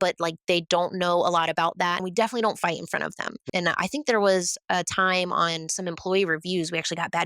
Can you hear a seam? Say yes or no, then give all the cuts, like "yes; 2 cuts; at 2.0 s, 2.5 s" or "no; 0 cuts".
yes; 2 cuts; at 2.0 s, 3.4 s